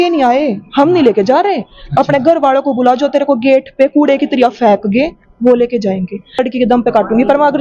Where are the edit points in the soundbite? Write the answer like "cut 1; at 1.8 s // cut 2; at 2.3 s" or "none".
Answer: cut 1; at 6.4 s